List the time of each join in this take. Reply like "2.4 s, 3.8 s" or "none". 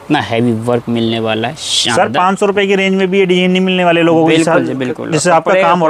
none